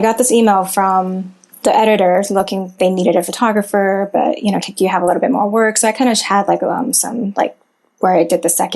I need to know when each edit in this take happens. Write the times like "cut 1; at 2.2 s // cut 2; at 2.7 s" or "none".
cut 1; at 1.4 s